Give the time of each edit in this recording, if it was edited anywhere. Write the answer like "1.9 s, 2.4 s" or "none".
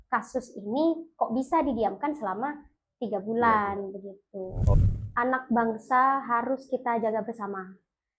4.7 s